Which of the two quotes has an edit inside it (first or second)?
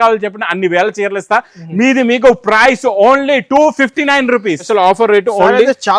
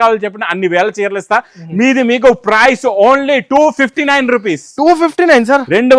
first